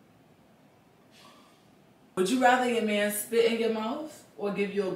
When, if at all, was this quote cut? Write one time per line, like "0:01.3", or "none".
0:02.1